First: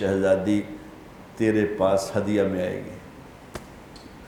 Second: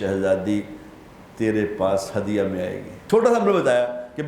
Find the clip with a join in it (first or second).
second